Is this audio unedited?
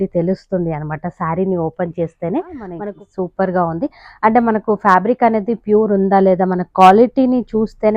no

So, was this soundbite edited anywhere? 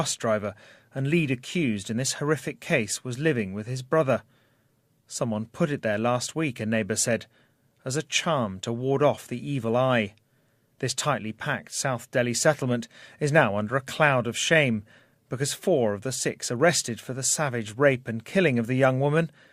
no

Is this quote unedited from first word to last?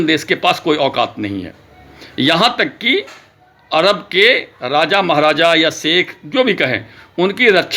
yes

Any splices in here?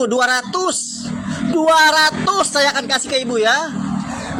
no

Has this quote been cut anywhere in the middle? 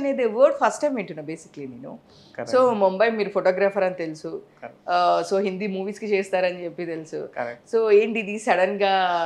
no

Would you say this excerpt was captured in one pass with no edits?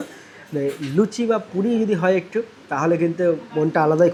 yes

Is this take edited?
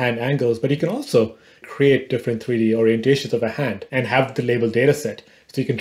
yes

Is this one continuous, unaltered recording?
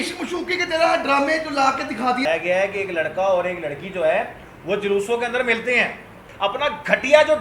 no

